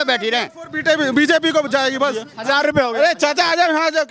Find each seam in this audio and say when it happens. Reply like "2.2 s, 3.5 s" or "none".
2.3 s